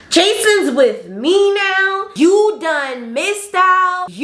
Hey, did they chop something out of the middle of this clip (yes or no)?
no